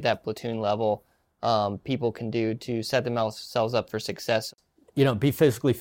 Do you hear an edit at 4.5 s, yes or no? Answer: yes